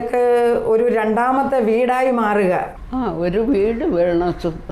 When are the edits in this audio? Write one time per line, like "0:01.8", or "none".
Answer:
0:02.8